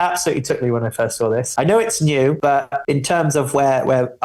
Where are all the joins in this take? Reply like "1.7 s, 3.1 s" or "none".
1.5 s, 2.5 s

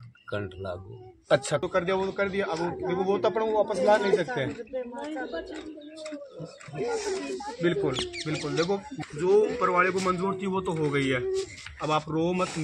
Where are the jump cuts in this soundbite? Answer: 1.6 s, 8.8 s

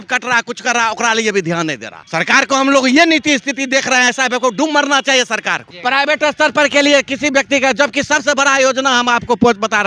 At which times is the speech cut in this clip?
1.9 s, 5.7 s

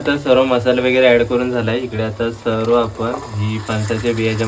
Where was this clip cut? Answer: none

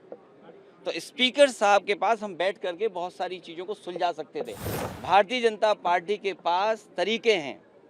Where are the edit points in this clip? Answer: 4.6 s

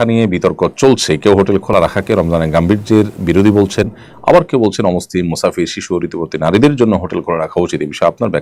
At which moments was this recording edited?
none

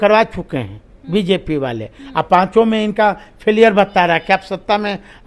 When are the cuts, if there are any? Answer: none

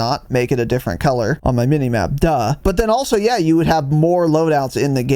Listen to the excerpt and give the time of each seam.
1.4 s, 2.6 s

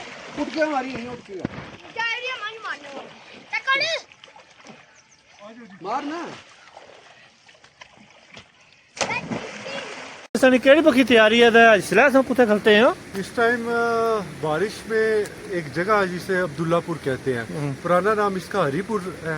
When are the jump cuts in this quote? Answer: 10.4 s

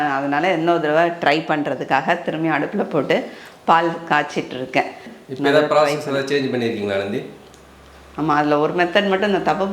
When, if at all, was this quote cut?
5.1 s

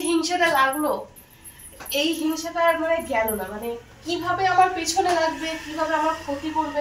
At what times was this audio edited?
none

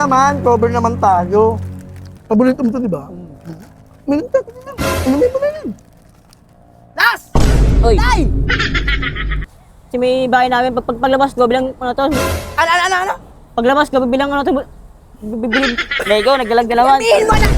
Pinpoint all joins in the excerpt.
9.4 s

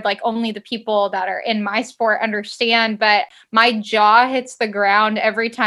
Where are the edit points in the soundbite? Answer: 3.3 s

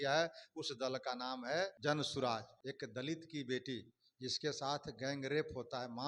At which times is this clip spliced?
1.8 s, 2.6 s

